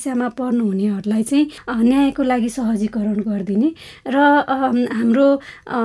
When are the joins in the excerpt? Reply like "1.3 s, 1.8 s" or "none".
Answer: none